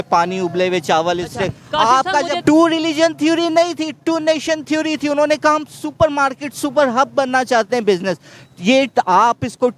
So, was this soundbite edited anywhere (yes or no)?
yes